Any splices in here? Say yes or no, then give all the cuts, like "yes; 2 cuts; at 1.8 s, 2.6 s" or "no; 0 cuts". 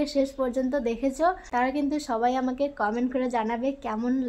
no; 0 cuts